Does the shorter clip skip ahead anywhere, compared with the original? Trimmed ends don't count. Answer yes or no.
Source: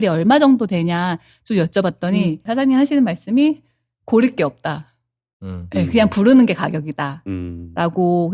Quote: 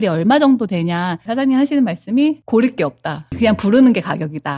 yes